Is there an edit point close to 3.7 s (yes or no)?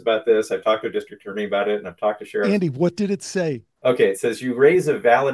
yes